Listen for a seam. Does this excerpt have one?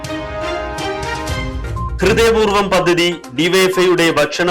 no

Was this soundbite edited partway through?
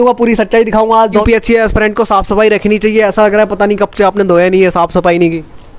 yes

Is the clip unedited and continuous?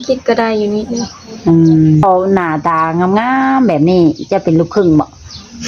no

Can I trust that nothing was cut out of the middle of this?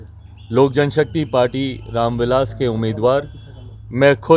yes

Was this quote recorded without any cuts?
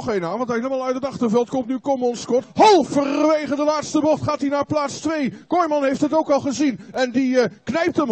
no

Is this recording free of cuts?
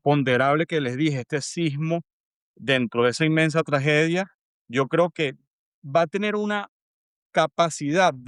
yes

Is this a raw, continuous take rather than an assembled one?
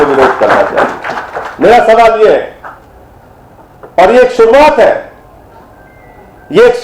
yes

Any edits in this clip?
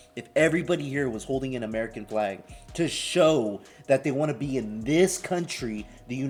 no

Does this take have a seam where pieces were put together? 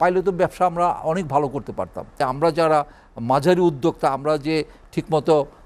yes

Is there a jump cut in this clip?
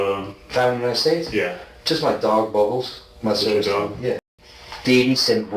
yes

